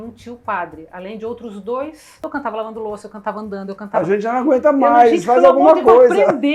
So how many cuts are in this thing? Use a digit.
1